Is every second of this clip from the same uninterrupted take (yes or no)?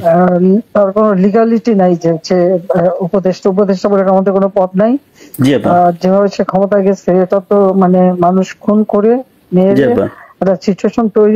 yes